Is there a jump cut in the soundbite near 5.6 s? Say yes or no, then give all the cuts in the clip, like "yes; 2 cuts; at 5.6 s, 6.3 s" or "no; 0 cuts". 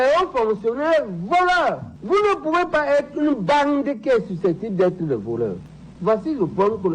yes; 1 cut; at 5.6 s